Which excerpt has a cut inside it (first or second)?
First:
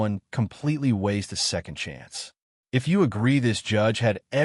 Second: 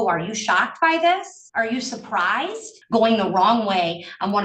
second